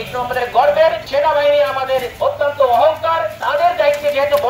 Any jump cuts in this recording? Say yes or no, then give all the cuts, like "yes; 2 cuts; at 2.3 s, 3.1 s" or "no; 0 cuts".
yes; 3 cuts; at 1.0 s, 2.1 s, 3.3 s